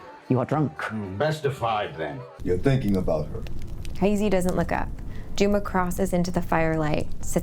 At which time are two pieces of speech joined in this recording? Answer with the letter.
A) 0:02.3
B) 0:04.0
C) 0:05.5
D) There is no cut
A